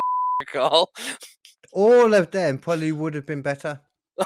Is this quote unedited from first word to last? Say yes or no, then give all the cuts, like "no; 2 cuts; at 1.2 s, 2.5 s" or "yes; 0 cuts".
yes; 0 cuts